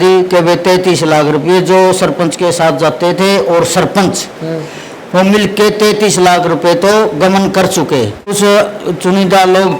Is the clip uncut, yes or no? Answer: no